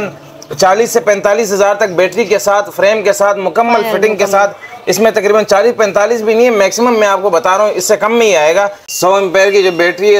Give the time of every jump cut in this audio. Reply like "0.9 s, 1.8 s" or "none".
8.9 s